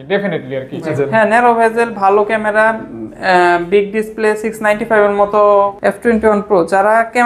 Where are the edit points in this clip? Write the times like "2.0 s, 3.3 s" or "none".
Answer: 0.9 s, 5.7 s